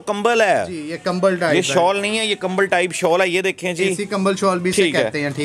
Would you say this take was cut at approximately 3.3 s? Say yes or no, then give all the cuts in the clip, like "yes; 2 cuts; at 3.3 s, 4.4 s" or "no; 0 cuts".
no; 0 cuts